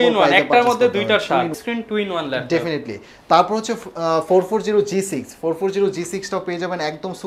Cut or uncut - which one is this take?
cut